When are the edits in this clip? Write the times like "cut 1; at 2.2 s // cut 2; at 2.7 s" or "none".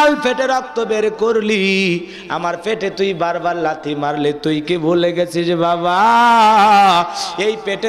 none